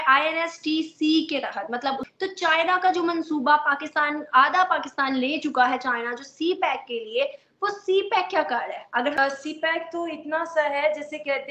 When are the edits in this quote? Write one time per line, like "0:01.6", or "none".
0:02.1
0:09.2